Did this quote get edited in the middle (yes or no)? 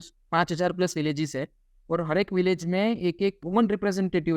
no